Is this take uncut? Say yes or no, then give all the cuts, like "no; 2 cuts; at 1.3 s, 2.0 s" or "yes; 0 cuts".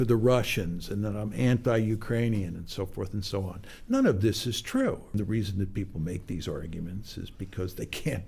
no; 1 cut; at 5.1 s